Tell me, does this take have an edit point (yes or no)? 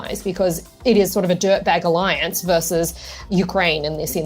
yes